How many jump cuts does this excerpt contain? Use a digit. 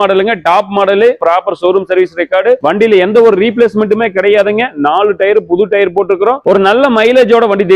2